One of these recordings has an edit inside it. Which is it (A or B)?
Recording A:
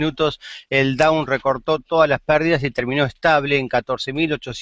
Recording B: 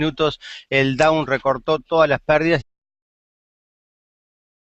A